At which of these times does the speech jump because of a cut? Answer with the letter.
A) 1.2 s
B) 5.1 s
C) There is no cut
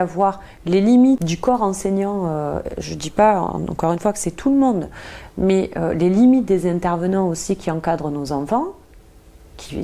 A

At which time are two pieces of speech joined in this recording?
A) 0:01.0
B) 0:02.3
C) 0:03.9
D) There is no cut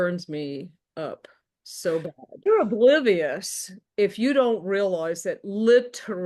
B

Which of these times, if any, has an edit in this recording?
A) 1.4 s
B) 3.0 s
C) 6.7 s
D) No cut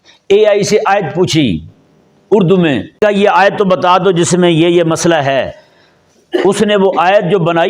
B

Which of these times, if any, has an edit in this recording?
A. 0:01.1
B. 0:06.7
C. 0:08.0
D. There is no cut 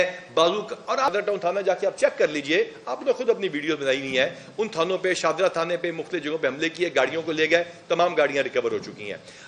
A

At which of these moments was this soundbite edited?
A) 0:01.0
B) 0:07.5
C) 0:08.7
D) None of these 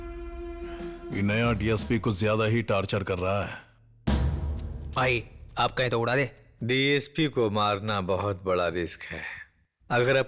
A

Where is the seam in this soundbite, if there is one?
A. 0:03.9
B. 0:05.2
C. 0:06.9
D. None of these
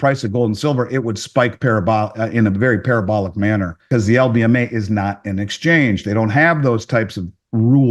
A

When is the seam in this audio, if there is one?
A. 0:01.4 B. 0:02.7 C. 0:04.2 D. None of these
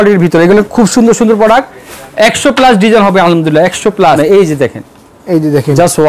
C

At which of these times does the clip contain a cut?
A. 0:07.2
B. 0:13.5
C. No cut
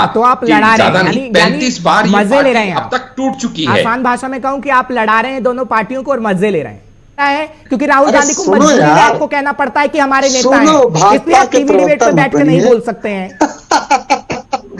A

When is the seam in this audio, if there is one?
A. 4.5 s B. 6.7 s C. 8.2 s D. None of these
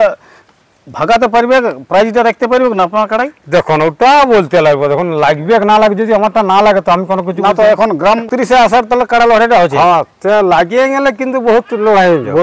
C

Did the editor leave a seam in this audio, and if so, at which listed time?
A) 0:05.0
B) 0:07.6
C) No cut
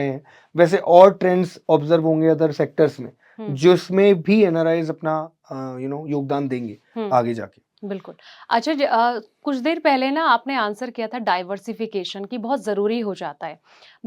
C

